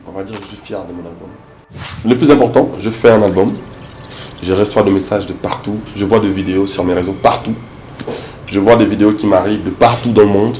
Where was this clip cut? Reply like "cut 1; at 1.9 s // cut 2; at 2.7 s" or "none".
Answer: cut 1; at 1.9 s